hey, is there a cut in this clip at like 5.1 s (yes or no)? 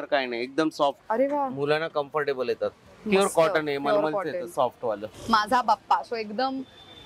yes